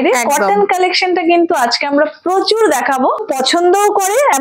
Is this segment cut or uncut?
cut